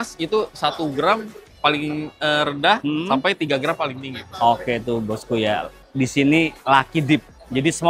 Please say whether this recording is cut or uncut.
uncut